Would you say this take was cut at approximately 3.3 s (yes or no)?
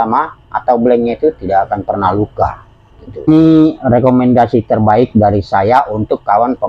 yes